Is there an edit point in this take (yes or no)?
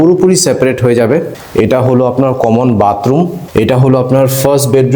yes